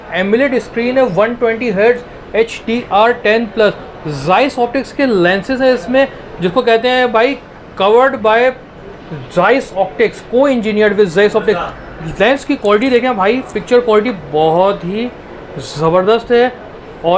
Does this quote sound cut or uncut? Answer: uncut